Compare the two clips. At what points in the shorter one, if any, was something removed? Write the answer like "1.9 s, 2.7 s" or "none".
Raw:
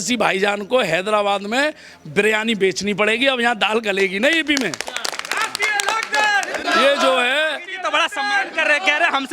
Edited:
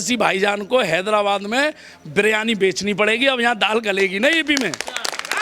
none